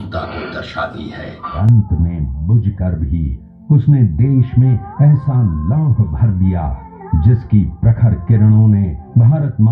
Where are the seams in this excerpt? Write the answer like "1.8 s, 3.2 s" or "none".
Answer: 1.6 s